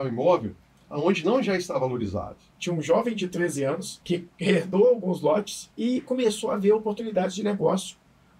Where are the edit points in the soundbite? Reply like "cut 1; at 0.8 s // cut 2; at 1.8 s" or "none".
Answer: cut 1; at 2.5 s // cut 2; at 3.9 s // cut 3; at 5.6 s